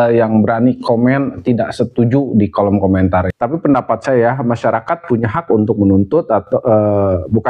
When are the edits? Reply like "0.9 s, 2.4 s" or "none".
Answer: 3.3 s